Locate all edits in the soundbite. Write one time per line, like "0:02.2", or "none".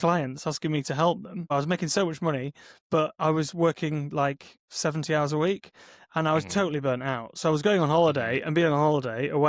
0:01.5